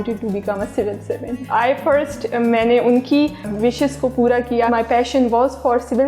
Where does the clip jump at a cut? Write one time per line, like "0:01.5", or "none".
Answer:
0:01.4
0:04.7